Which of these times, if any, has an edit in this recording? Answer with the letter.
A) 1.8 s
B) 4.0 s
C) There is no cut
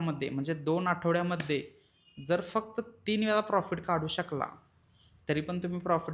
C